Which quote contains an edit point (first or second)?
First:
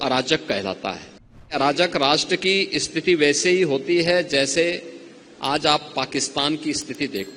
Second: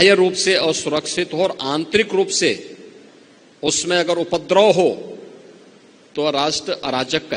first